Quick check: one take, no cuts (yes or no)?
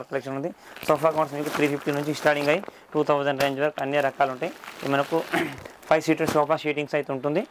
yes